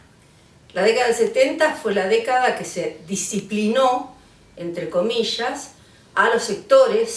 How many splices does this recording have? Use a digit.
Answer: 0